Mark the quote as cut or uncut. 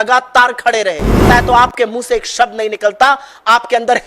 cut